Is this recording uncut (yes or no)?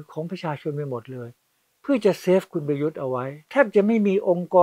no